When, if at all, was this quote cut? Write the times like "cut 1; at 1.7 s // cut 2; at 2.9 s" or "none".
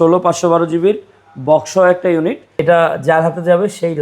cut 1; at 2.6 s